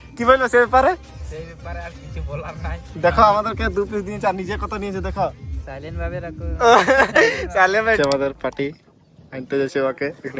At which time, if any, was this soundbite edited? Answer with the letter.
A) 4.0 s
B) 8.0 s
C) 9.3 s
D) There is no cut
B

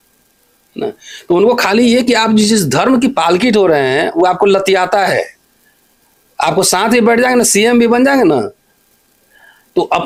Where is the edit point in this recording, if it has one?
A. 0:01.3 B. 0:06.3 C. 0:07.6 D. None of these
D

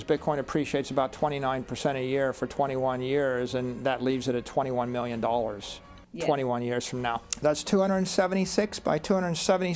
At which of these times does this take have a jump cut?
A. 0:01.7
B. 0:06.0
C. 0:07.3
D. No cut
C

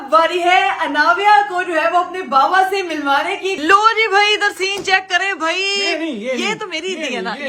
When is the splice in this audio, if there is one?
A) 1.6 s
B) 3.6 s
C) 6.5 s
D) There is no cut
B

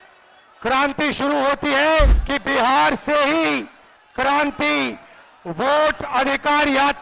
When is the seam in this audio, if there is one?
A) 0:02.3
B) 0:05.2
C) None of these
A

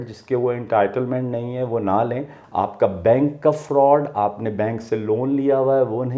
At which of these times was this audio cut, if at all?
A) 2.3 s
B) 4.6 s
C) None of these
A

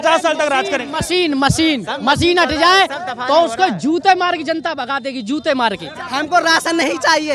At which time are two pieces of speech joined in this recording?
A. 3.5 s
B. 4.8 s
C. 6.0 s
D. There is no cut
C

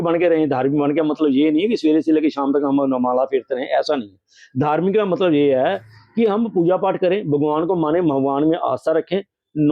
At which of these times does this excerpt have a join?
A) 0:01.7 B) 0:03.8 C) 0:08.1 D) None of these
D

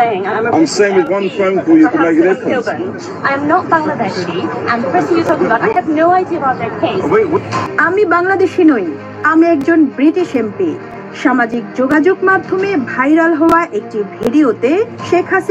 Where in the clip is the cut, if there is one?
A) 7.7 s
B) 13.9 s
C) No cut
A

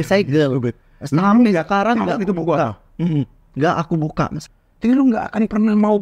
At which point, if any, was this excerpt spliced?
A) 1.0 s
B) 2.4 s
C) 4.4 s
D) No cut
C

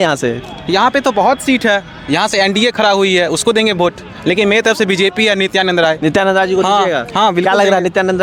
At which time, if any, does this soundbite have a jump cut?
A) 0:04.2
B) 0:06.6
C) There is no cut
C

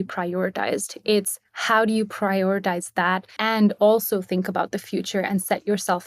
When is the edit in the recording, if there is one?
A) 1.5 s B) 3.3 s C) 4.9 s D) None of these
B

